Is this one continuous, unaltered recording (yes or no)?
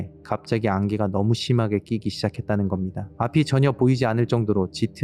no